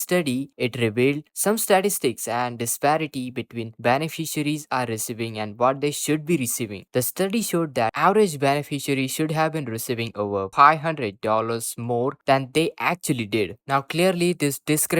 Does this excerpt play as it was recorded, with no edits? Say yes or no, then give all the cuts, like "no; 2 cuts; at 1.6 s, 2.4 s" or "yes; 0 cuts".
no; 1 cut; at 7.9 s